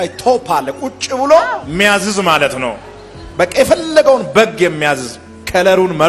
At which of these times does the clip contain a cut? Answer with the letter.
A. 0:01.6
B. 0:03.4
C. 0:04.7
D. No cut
A